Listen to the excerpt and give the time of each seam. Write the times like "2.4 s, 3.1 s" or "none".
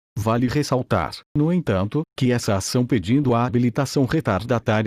2.9 s